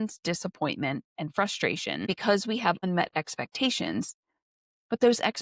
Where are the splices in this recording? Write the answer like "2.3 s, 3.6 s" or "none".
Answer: 1.1 s, 2.1 s